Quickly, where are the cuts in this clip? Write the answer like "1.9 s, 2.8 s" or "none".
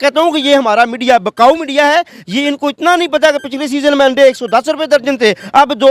none